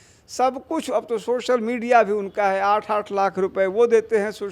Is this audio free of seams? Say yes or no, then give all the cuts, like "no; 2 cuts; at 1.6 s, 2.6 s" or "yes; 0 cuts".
yes; 0 cuts